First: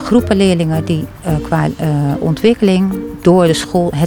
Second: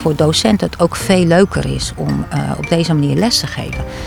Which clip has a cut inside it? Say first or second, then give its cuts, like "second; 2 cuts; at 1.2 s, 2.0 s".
first; 1 cut; at 3.1 s